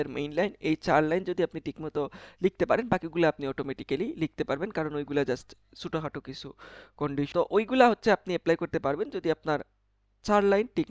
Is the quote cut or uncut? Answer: cut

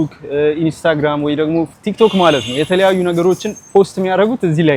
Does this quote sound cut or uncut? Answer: uncut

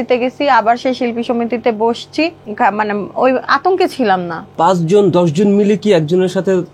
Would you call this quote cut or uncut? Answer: cut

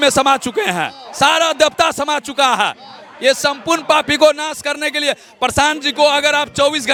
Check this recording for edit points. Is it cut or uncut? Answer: uncut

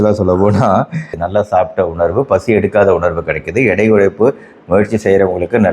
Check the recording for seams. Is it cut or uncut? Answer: cut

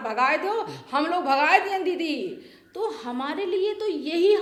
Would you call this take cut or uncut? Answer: uncut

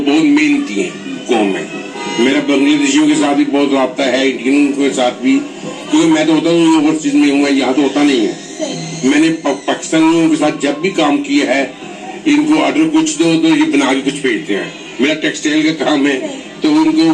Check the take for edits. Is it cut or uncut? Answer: uncut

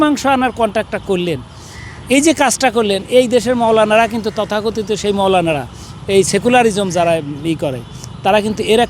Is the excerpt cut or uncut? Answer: uncut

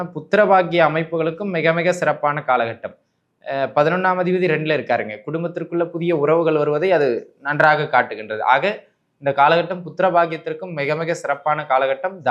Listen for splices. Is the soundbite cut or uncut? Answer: uncut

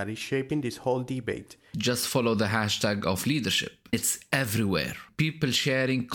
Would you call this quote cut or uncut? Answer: cut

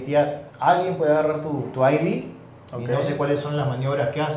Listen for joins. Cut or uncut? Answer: uncut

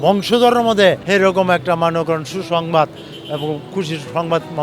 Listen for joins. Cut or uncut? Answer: cut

